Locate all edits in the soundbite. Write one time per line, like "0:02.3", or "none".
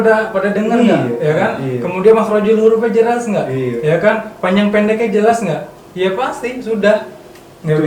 none